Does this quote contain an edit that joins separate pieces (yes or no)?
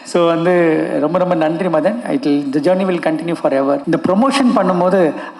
yes